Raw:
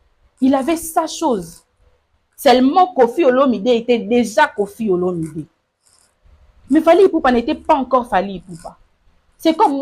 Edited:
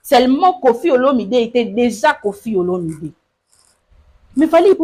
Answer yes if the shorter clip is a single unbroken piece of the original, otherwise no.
yes